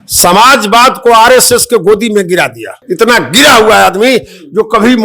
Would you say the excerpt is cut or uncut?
cut